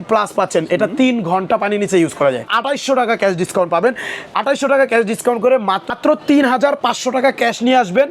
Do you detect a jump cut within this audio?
yes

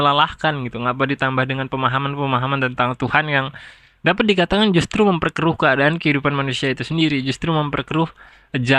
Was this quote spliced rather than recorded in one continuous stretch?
no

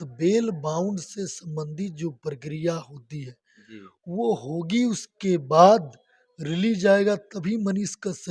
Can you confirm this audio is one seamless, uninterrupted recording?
yes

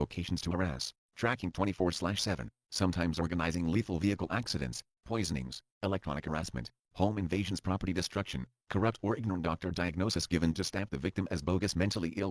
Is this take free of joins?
yes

